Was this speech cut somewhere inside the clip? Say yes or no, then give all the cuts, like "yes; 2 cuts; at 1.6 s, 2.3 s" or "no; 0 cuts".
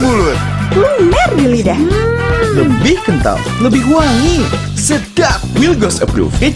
no; 0 cuts